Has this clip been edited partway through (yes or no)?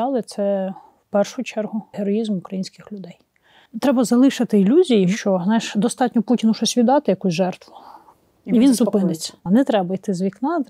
yes